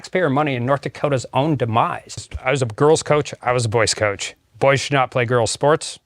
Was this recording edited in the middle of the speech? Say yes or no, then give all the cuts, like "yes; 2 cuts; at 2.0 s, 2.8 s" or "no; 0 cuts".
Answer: yes; 1 cut; at 2.3 s